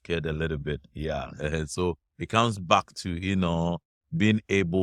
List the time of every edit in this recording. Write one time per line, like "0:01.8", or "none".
none